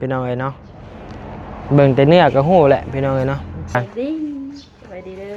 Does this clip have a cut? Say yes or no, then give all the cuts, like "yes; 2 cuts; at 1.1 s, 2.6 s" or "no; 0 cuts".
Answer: yes; 1 cut; at 3.8 s